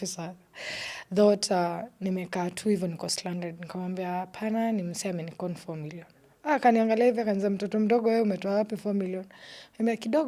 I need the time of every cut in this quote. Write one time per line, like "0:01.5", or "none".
none